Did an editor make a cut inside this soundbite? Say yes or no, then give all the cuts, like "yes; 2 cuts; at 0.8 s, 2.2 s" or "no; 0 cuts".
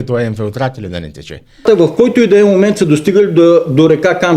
yes; 1 cut; at 1.6 s